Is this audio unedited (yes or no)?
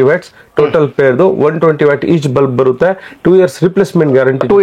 yes